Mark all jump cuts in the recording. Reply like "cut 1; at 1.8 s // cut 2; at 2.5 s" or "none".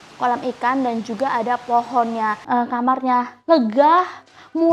cut 1; at 2.4 s